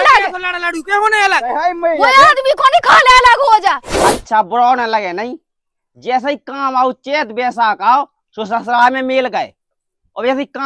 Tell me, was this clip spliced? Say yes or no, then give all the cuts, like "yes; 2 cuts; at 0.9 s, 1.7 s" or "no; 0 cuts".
yes; 1 cut; at 3.9 s